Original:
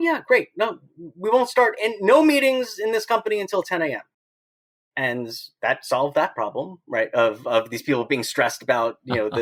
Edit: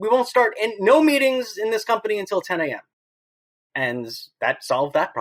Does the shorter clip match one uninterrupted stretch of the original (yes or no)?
yes